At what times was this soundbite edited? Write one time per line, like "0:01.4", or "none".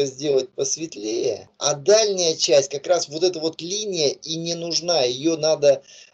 0:01.5